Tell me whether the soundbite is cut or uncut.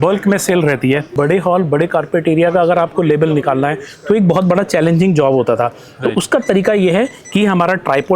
cut